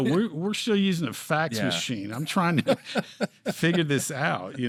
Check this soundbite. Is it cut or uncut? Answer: uncut